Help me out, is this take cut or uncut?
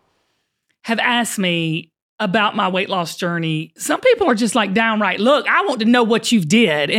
cut